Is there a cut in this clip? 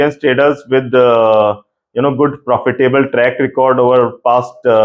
no; 0 cuts

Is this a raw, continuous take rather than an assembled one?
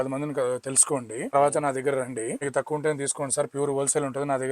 no; 2 cuts; at 1.3 s, 2.4 s

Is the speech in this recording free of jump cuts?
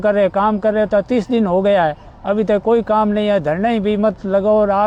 yes; 0 cuts

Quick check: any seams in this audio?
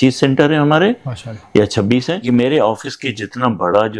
yes; 1 cut; at 2.2 s

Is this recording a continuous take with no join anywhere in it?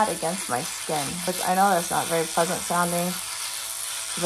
no; 1 cut; at 1.2 s

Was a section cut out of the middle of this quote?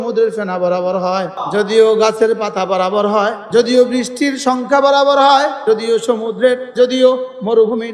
yes; 4 cuts; at 1.4 s, 3.4 s, 5.6 s, 6.7 s

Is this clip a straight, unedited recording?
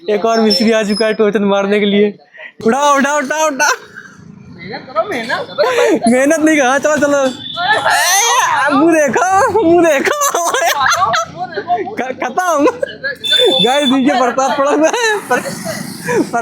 no; 1 cut; at 2.5 s

